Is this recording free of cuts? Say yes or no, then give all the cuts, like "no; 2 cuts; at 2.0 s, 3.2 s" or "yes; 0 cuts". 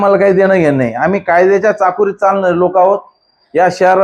yes; 0 cuts